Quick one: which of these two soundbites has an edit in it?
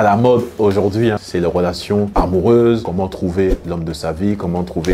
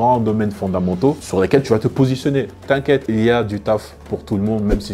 second; 1 cut; at 1.2 s

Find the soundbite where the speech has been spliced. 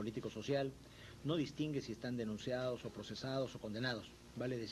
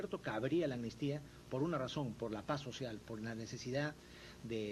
first; 1 cut; at 2.4 s

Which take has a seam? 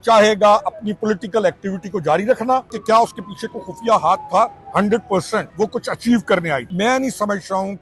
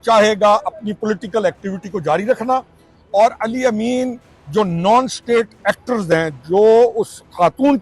first; 3 cuts; at 2.7 s, 5.5 s, 6.7 s

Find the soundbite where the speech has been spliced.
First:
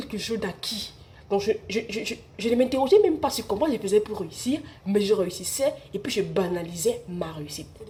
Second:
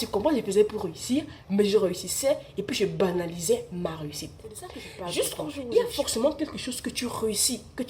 second; 1 cut; at 5.5 s

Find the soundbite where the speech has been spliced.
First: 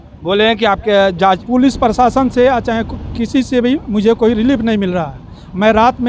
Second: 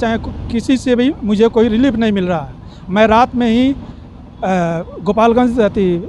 first; 1 cut; at 1.4 s

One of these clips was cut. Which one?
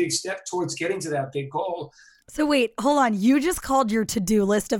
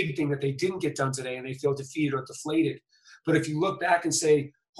first; 1 cut; at 2.2 s

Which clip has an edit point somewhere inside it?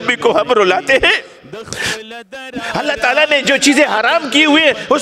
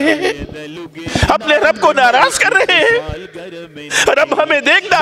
first; 1 cut; at 2.7 s

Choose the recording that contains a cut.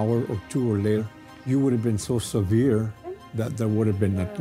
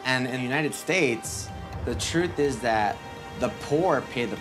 first; 1 cut; at 1.0 s

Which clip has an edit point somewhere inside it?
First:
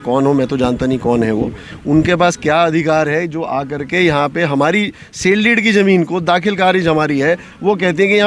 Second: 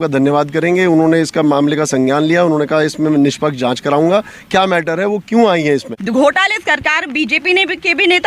second; 1 cut; at 5.9 s

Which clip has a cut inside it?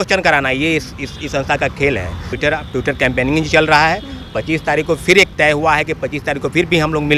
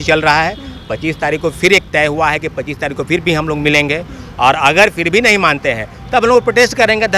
first; 1 cut; at 2.3 s

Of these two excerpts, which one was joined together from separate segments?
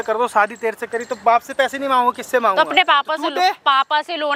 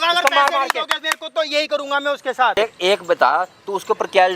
second; 1 cut; at 2.6 s

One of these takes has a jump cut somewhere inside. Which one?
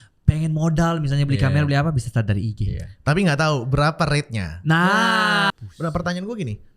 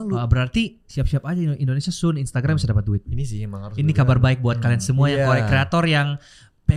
first; 1 cut; at 5.5 s

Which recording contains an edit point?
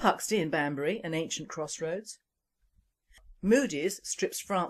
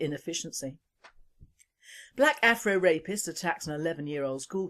first; 1 cut; at 1.0 s

